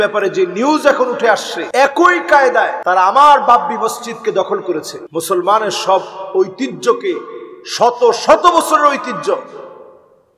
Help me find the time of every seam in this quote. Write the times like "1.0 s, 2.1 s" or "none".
1.6 s, 2.8 s, 5.0 s